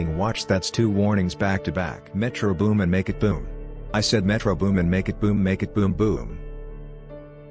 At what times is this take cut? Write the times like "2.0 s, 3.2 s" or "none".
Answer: 2.0 s